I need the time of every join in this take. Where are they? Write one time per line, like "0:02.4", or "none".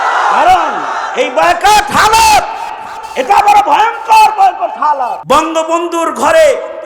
0:05.2